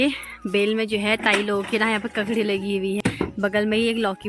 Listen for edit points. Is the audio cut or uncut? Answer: cut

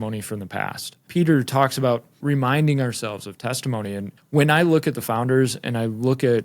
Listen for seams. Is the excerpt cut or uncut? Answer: cut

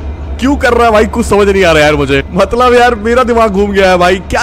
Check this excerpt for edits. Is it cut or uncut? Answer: cut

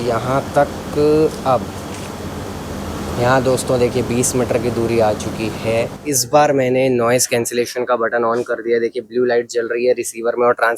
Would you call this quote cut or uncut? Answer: cut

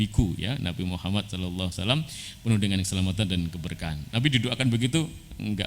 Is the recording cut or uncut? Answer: uncut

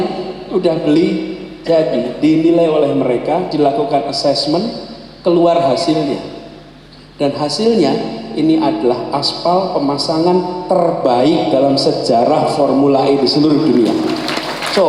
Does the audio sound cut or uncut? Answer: uncut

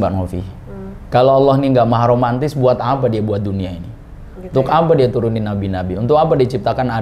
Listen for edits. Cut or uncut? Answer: uncut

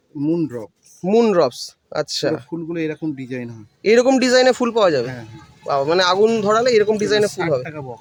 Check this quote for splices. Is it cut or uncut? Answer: uncut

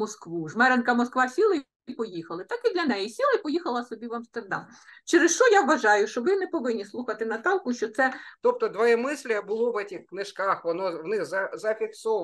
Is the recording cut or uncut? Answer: cut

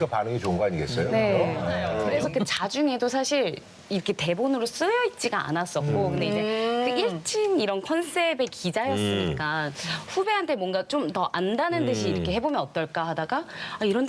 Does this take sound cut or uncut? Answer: cut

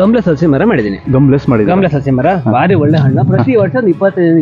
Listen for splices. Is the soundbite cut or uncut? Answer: uncut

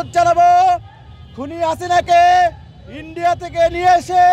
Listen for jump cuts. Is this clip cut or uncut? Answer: uncut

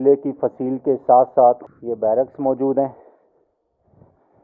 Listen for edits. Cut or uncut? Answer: uncut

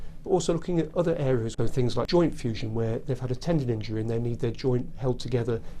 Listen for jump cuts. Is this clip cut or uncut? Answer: cut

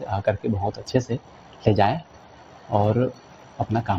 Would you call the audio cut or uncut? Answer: uncut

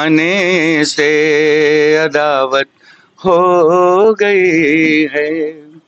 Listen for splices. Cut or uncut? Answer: uncut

